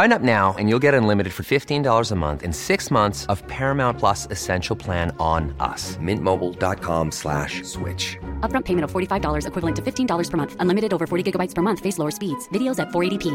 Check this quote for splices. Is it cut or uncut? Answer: uncut